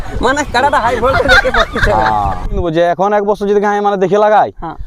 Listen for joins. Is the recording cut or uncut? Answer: cut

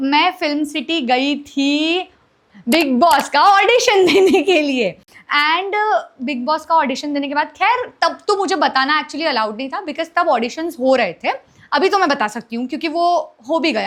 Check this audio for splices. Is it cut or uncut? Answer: uncut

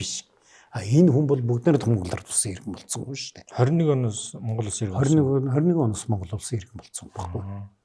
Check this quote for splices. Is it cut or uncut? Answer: uncut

